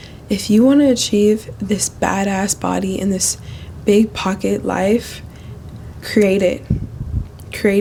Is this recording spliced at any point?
no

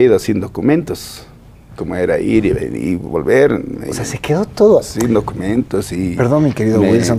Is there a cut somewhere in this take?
no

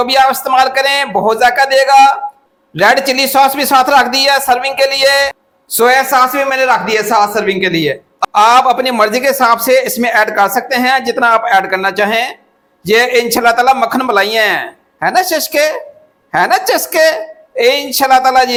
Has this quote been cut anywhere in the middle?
no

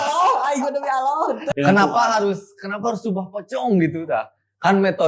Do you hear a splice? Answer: yes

